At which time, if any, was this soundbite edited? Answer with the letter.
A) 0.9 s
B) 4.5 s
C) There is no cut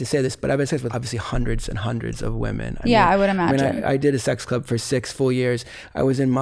A